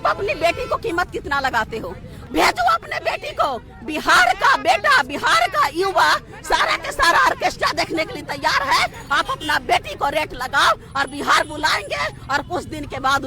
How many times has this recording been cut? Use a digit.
1